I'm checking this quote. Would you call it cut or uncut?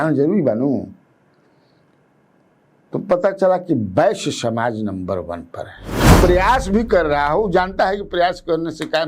cut